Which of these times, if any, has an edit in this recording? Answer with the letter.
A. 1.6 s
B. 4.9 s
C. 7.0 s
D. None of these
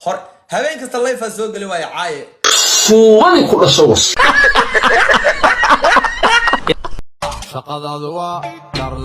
C